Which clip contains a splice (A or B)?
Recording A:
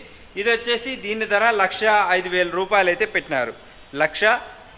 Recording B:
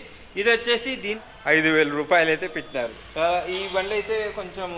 B